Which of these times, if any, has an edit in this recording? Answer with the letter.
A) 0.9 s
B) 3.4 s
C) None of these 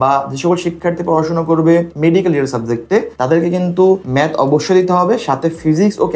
C